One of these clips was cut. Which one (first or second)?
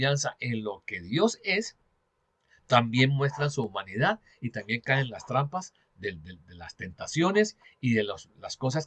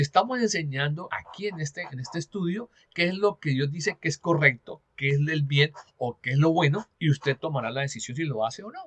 second